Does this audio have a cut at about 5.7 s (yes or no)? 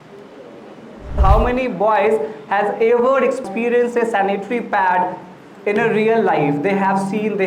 no